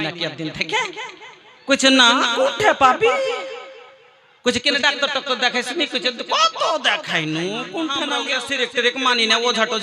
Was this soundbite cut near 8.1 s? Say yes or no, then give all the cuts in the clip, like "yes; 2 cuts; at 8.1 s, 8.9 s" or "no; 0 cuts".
yes; 1 cut; at 8.1 s